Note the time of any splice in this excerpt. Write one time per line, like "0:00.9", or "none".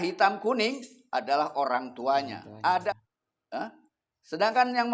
0:02.9